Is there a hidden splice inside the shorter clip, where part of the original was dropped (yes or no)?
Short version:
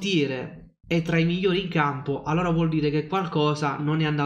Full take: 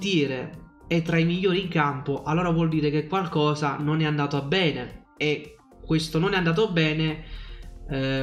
no